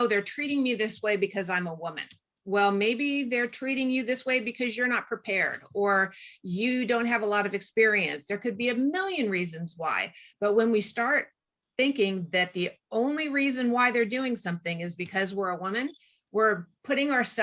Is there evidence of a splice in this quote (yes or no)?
no